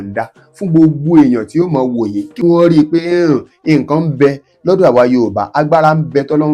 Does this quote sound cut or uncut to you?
cut